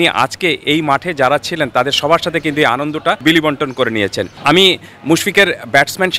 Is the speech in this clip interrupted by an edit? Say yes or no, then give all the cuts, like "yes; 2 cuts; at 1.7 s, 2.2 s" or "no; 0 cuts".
yes; 2 cuts; at 3.2 s, 4.3 s